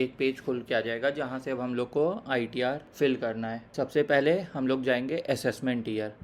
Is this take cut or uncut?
cut